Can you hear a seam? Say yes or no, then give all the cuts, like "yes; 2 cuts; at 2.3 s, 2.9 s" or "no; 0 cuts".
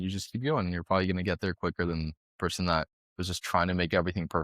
no; 0 cuts